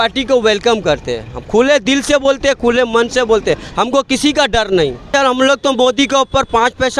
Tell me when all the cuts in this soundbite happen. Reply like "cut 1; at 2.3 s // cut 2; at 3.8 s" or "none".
cut 1; at 5.1 s